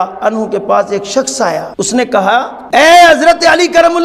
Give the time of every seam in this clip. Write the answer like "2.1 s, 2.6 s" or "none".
1.7 s, 2.6 s